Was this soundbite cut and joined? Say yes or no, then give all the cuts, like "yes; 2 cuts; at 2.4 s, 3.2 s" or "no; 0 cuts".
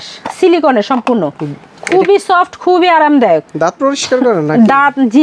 no; 0 cuts